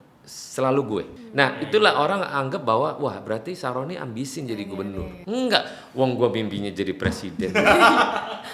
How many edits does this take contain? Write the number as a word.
two